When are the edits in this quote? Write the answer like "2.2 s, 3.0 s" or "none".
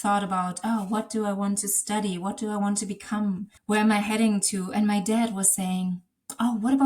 3.5 s